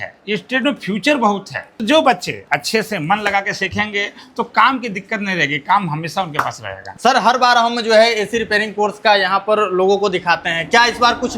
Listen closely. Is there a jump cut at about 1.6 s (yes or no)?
yes